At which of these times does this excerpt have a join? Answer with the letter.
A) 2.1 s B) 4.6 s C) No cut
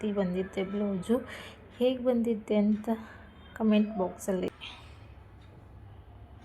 B